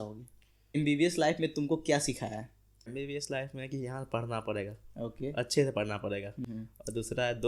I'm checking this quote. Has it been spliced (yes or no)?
yes